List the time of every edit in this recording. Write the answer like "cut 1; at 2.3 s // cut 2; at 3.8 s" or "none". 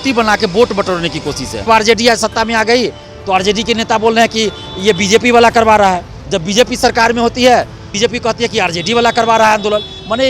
cut 1; at 1.7 s